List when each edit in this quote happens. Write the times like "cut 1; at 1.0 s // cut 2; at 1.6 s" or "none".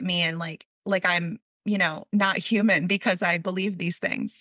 none